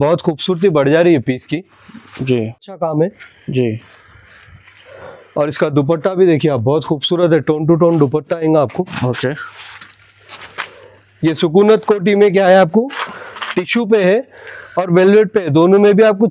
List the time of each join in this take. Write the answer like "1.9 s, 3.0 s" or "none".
none